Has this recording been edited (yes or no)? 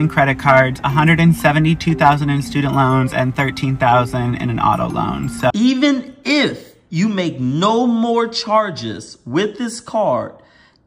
yes